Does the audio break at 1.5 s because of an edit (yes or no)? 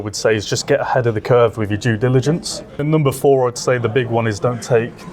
no